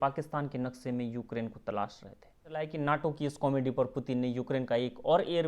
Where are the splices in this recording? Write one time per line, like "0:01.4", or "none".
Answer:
0:02.6